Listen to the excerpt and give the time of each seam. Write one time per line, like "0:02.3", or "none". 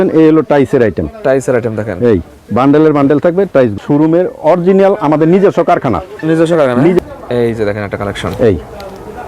0:03.8
0:07.0